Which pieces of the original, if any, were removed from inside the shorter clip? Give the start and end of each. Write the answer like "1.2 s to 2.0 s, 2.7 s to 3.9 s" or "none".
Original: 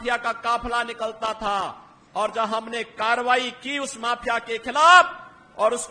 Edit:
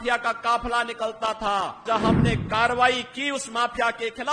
1.8 s to 2.3 s